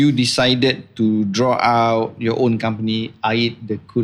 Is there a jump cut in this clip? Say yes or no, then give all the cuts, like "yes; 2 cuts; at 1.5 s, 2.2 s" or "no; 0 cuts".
no; 0 cuts